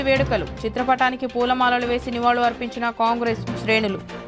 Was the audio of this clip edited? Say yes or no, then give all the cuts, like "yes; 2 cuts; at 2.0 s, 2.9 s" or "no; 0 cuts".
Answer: no; 0 cuts